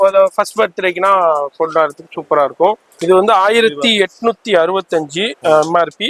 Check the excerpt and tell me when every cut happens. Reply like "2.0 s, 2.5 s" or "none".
2.9 s